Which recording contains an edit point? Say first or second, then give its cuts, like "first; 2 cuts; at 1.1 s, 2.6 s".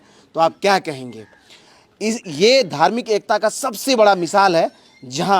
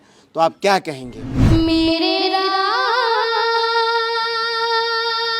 second; 1 cut; at 1.3 s